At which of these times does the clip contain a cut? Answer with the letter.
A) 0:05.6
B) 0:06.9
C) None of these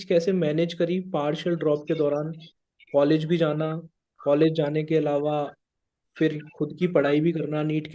C